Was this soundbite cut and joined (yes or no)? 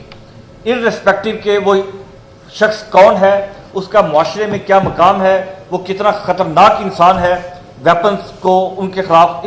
no